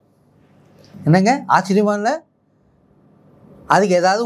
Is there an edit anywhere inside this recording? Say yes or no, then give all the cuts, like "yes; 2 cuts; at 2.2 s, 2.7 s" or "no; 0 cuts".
no; 0 cuts